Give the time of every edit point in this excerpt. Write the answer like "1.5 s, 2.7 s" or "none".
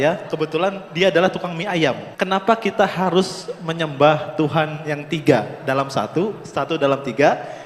2.1 s